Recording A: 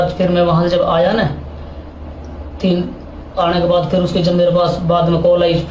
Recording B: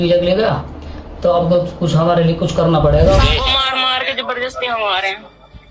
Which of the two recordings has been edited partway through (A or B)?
B